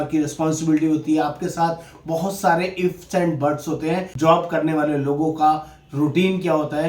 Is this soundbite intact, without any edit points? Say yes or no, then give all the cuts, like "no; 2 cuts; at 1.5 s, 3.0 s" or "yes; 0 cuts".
no; 1 cut; at 4.1 s